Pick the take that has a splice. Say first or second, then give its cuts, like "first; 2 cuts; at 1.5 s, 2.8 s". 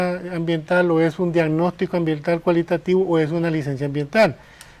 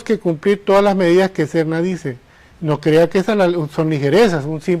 second; 1 cut; at 1.0 s